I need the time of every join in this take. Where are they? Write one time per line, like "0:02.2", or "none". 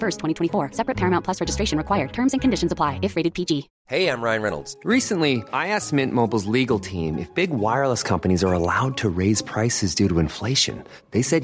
0:03.8